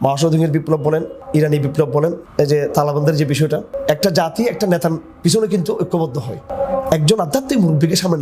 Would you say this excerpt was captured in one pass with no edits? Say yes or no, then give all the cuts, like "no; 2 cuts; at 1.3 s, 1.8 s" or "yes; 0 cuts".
no; 4 cuts; at 1.2 s, 2.2 s, 3.7 s, 6.4 s